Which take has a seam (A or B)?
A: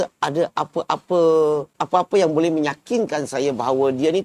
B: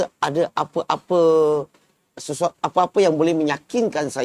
A